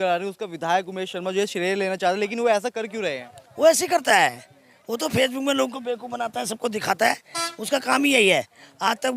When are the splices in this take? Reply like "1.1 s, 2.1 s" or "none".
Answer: none